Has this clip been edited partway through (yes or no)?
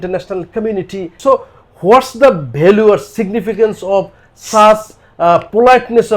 yes